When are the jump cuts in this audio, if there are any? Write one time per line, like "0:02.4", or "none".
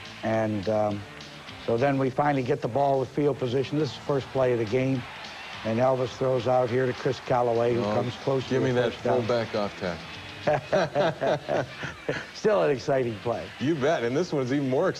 0:13.1